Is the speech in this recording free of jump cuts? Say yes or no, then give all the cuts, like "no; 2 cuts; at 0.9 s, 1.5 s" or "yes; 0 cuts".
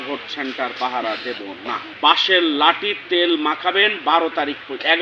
no; 1 cut; at 1.9 s